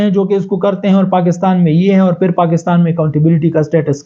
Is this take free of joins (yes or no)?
yes